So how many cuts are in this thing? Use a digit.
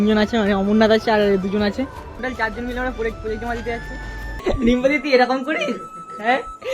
1